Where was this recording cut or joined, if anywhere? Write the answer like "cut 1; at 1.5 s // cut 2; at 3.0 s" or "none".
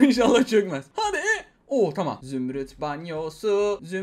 cut 1; at 2.2 s